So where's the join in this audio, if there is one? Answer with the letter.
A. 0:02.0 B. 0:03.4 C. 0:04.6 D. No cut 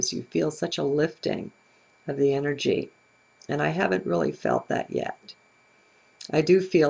D